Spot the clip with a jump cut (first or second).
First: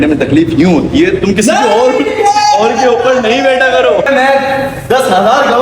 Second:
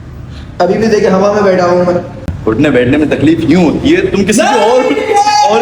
first